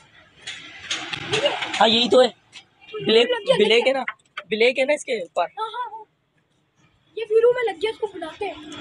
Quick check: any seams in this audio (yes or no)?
no